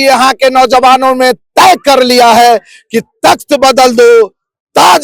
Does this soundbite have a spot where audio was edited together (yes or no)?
no